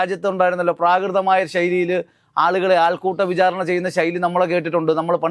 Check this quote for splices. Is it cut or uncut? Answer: uncut